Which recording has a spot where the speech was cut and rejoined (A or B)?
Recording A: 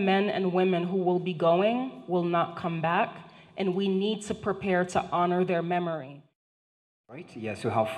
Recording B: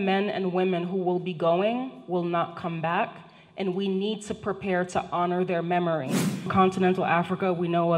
B